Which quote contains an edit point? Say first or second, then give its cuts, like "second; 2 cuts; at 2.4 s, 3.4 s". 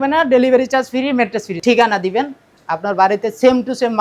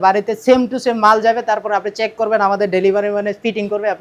first; 1 cut; at 1.6 s